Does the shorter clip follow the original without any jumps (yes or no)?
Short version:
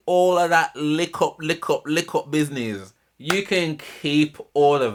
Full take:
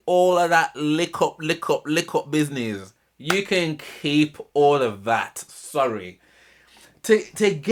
yes